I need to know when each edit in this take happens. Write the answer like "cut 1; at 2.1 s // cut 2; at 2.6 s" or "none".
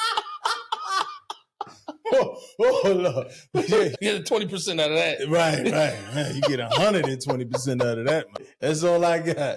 cut 1; at 3.9 s // cut 2; at 8.5 s